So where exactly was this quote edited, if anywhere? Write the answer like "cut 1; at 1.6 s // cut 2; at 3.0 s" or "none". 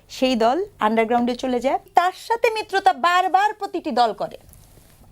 cut 1; at 1.9 s